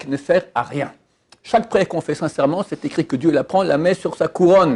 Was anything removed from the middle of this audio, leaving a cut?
no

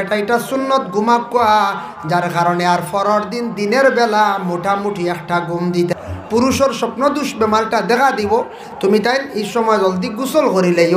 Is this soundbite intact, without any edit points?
no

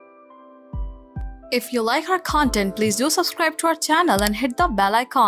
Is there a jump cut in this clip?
yes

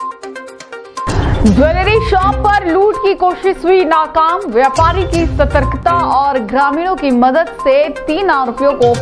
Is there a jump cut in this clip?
yes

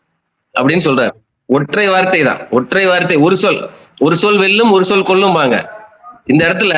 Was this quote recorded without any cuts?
no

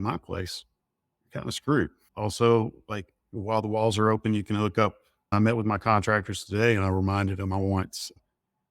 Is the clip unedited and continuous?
no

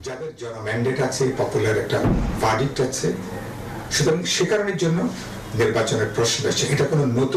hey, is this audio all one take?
yes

